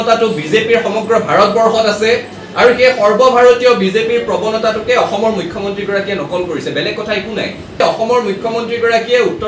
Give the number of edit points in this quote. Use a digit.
1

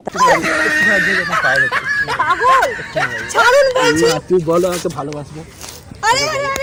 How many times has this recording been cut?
0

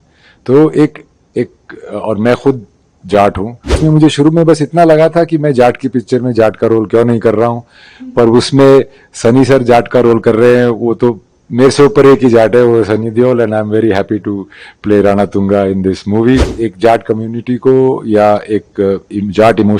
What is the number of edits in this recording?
2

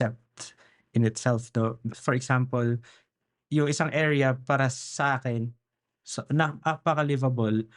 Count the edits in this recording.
1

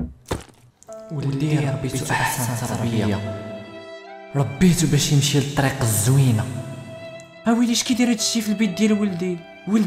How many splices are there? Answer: 0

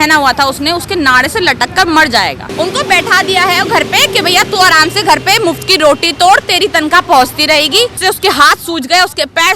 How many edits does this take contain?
2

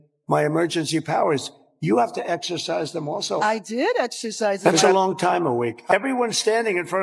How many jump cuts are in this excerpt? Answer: 2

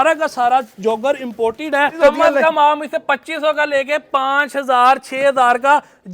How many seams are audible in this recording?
1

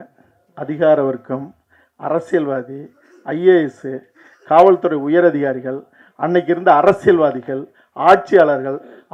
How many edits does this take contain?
0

